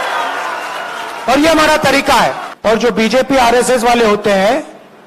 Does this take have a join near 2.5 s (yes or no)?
yes